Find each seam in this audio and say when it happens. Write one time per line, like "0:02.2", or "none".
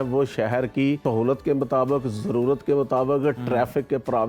0:01.0